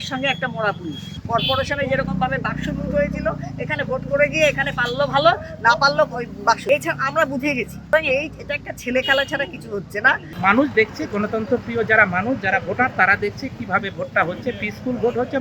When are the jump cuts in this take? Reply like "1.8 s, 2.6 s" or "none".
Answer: 1.2 s, 6.6 s, 7.9 s, 10.3 s